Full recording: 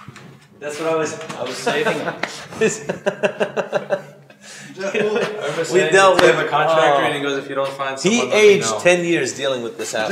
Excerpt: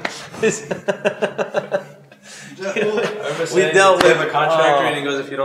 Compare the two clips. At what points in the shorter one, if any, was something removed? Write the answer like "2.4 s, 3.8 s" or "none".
none